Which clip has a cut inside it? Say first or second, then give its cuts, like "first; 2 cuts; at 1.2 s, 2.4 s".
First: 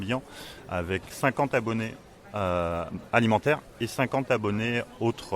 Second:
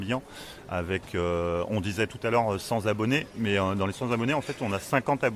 first; 1 cut; at 1.1 s